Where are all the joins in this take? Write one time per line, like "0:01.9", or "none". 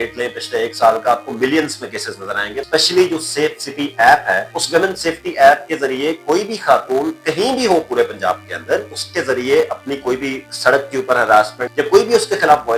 0:02.6
0:04.5
0:09.0
0:11.6